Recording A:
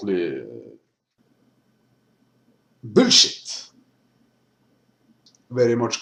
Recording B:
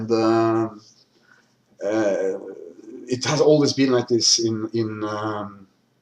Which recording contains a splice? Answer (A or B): B